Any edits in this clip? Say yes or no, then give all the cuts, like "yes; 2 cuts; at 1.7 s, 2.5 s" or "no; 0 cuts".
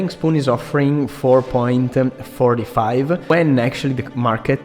yes; 1 cut; at 3.3 s